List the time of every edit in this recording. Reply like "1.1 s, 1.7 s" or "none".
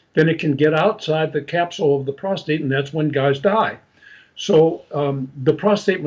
none